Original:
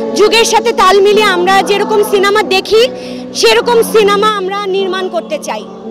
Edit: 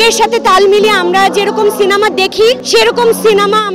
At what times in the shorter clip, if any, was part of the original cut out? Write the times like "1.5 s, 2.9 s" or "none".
2.6 s